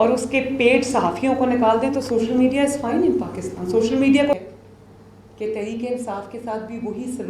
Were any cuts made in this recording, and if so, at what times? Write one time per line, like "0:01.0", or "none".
0:04.3